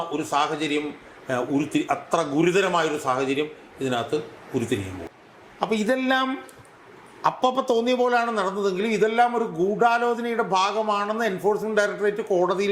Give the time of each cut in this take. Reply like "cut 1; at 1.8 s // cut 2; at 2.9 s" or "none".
cut 1; at 5.0 s